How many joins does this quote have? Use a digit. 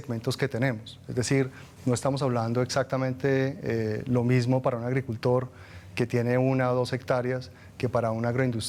0